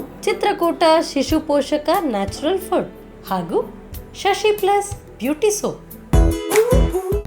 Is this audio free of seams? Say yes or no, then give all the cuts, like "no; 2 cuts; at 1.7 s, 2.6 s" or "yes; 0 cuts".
no; 1 cut; at 5.9 s